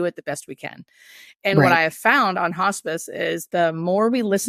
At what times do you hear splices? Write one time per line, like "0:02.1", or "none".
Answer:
none